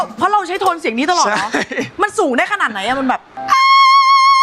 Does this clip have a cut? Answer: yes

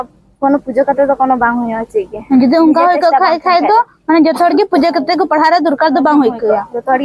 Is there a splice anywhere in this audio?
no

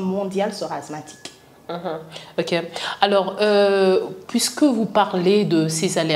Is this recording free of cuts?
yes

